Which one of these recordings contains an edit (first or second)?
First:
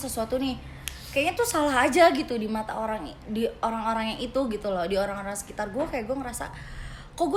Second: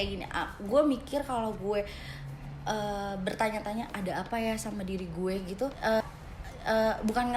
second